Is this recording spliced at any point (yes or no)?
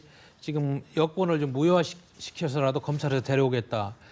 no